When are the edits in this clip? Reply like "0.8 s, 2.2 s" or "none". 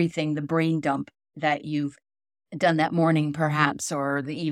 1.2 s